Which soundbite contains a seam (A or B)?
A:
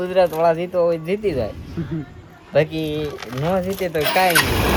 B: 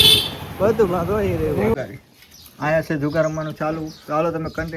B